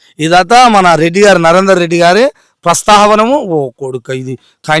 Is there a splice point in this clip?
no; 0 cuts

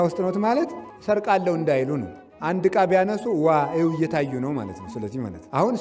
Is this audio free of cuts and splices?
yes; 0 cuts

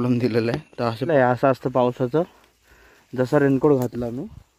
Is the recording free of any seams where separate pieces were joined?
no; 1 cut; at 1.1 s

